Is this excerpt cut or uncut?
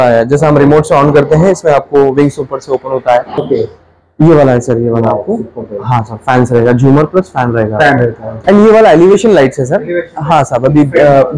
cut